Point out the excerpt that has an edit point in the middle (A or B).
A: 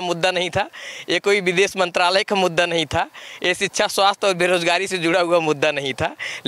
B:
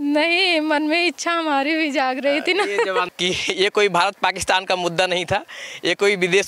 B